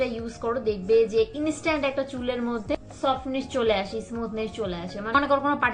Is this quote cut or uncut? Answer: uncut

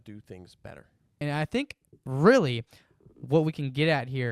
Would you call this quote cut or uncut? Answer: cut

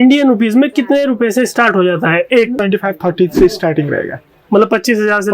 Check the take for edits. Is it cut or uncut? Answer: cut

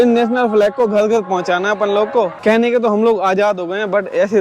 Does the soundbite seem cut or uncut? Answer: cut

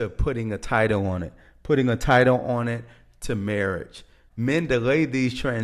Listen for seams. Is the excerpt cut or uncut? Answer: uncut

